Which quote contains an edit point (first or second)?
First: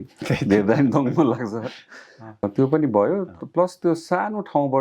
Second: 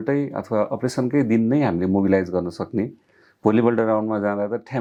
first